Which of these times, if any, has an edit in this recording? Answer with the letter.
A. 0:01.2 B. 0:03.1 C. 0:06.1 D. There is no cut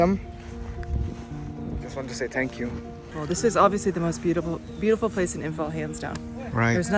B